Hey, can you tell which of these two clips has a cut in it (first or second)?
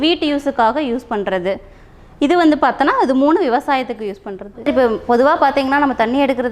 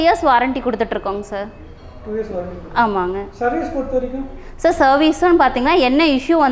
first